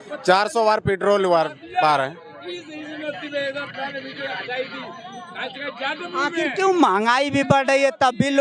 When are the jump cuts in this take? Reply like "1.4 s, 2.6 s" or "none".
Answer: none